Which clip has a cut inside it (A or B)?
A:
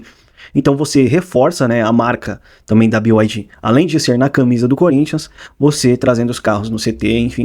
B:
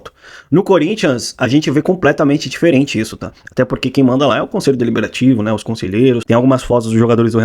B